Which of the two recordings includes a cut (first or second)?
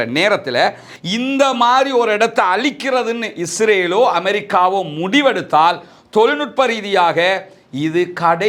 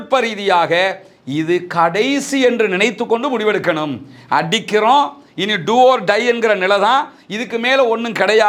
first